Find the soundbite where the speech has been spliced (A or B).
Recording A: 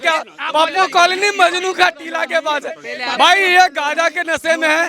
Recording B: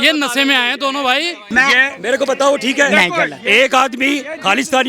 B